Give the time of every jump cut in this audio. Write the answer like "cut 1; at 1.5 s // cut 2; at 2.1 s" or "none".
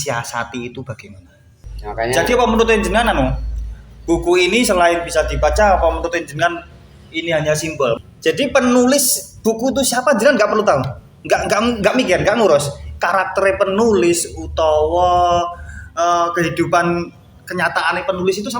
cut 1; at 1.6 s // cut 2; at 8.0 s